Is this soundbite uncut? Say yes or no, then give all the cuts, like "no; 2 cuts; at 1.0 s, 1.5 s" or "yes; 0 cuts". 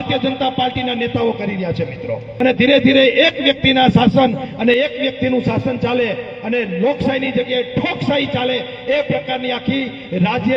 no; 1 cut; at 2.3 s